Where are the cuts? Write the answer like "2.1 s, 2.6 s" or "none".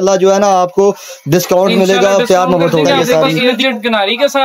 3.0 s

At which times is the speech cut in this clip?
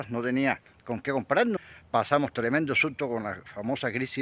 1.6 s

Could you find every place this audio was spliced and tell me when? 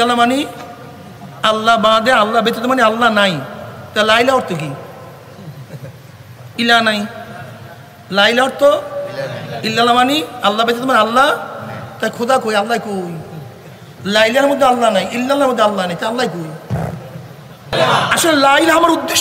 17.7 s

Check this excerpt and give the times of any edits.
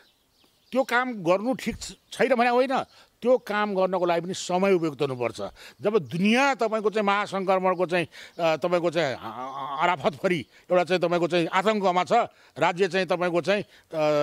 none

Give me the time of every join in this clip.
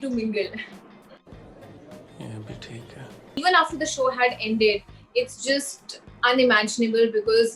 3.4 s

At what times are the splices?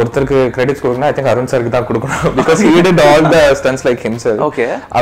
none

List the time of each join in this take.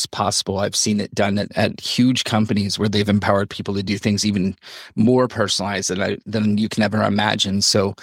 1.5 s

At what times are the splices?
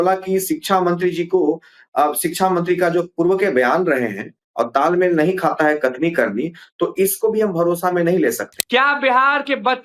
8.5 s

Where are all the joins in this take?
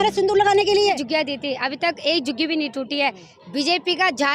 1.0 s

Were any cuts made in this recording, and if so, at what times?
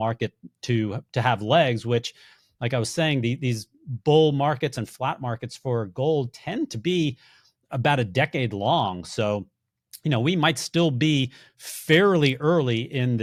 none

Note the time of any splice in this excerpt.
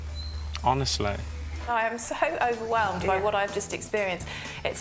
1.7 s

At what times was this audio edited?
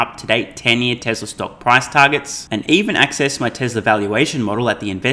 none

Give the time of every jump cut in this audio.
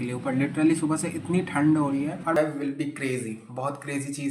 2.4 s

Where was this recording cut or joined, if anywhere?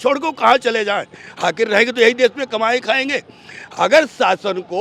none

